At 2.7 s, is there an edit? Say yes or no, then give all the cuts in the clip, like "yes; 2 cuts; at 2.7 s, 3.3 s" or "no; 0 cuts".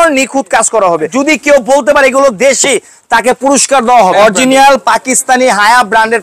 no; 2 cuts; at 1.1 s, 4.1 s